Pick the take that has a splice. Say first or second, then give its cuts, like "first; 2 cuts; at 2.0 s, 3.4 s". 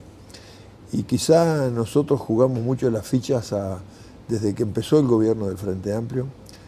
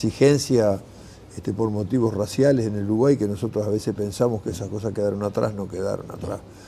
second; 1 cut; at 3.2 s